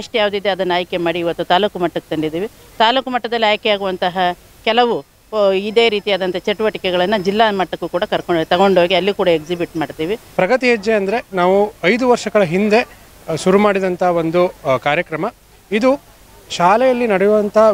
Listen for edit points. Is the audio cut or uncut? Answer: cut